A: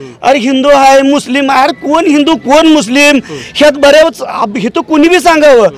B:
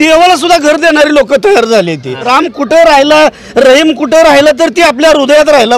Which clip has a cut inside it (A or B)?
B